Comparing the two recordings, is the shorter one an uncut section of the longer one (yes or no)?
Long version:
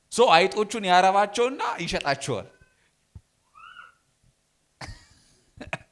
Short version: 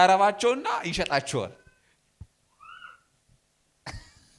yes